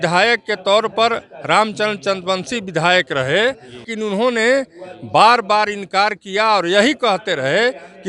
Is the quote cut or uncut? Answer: cut